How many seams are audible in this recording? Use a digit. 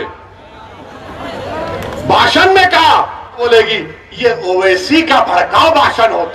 1